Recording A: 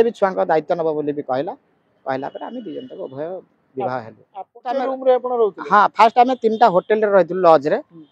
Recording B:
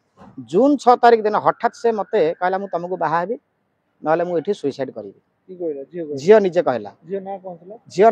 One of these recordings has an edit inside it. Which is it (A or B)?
A